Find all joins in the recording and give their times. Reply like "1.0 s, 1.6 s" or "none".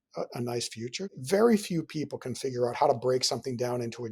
1.1 s